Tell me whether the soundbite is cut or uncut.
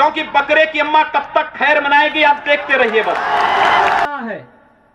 cut